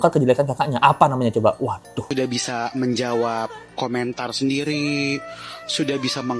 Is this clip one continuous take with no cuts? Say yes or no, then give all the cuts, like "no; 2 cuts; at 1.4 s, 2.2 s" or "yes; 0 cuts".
no; 1 cut; at 2.1 s